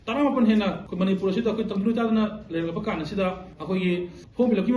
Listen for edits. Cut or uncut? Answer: cut